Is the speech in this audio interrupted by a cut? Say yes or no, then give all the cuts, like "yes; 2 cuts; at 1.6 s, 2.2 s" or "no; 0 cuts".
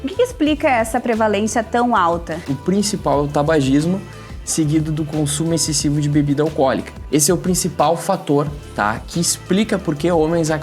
yes; 2 cuts; at 2.5 s, 6.9 s